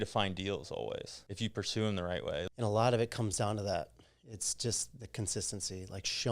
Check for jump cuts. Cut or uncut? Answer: cut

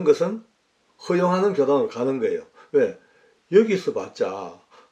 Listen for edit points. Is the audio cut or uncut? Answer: uncut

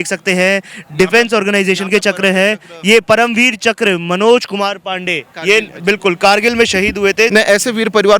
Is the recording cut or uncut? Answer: cut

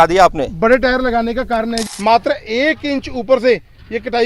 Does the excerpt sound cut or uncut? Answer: cut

